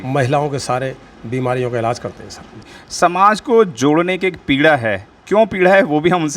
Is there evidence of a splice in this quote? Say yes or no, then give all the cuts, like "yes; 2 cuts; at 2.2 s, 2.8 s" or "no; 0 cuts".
yes; 1 cut; at 2.8 s